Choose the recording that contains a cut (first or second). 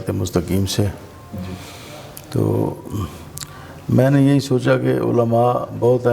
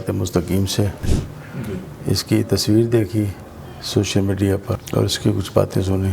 second